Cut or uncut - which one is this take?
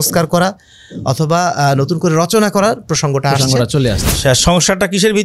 cut